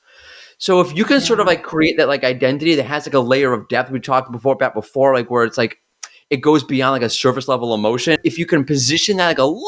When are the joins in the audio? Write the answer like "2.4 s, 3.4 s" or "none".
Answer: 8.2 s